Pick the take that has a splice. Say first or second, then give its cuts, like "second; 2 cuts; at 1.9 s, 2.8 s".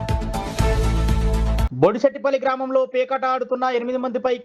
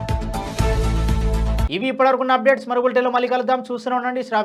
first; 1 cut; at 1.7 s